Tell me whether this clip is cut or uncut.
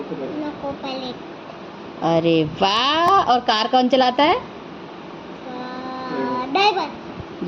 uncut